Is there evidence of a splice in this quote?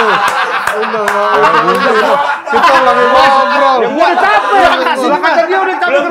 no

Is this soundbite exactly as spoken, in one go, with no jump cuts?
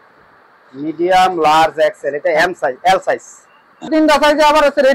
no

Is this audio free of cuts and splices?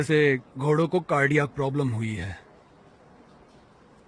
yes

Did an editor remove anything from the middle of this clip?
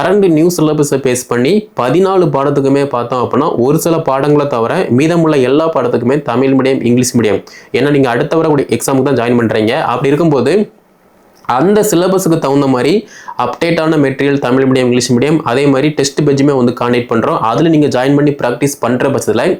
no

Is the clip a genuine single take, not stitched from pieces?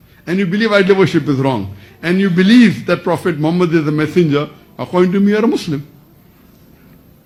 yes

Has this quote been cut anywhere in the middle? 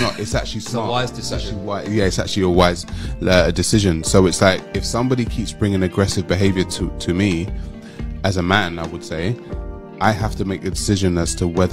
no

